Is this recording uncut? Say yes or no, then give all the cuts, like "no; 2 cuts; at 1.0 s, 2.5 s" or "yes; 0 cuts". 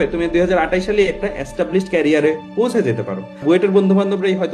no; 1 cut; at 3.4 s